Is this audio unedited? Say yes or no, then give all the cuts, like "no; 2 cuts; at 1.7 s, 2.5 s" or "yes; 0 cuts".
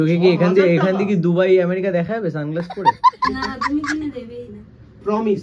no; 2 cuts; at 2.7 s, 3.3 s